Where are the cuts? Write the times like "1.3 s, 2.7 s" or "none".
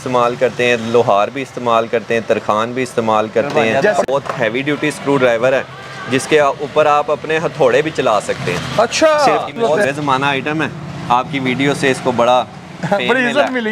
4.1 s, 9.6 s